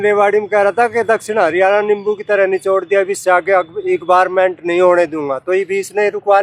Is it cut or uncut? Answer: uncut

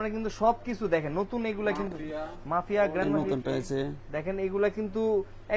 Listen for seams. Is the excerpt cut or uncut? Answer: uncut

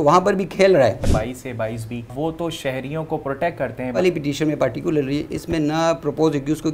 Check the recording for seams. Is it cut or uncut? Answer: cut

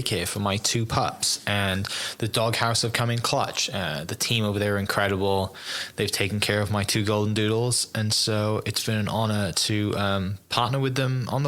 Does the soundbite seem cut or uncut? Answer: uncut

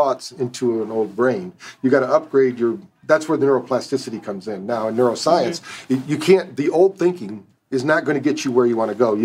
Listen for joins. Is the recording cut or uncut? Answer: uncut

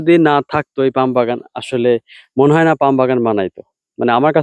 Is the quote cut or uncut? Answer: uncut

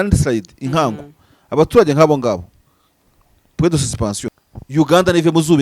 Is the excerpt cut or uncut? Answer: cut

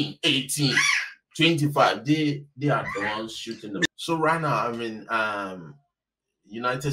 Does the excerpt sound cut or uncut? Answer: cut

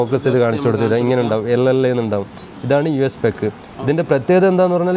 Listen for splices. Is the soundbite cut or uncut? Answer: uncut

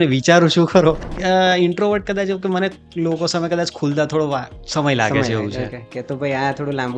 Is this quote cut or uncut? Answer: cut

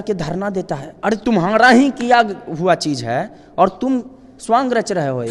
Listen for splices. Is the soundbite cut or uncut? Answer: uncut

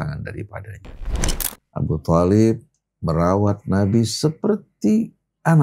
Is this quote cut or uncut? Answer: cut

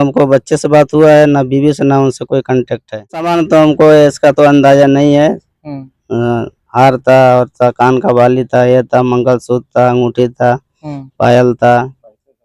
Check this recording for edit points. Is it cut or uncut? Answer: cut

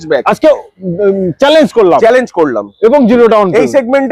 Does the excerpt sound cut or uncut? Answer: uncut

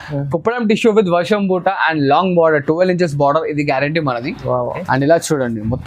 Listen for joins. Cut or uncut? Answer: cut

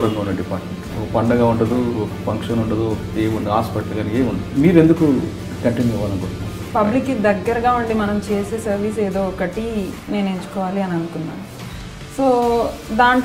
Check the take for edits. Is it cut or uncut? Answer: cut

